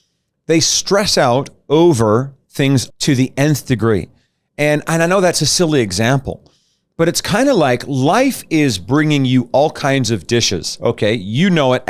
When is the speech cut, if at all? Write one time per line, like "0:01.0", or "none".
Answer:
0:02.9